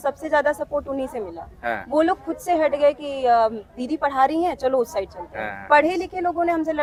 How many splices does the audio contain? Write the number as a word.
zero